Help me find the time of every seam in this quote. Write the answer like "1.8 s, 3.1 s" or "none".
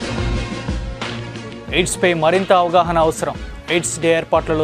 1.5 s